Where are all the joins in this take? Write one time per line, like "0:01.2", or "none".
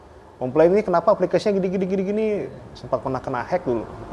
0:02.6